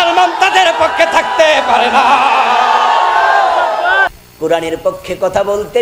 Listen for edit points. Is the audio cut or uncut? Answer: cut